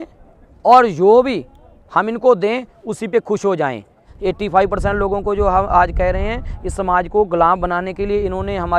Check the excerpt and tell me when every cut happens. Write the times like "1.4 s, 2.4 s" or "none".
4.1 s